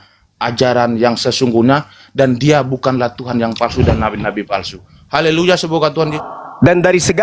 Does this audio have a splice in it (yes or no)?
yes